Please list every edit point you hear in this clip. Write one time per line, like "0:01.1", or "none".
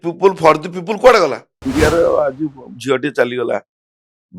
0:01.5